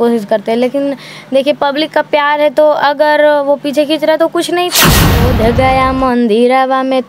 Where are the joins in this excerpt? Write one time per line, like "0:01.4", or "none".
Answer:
0:04.9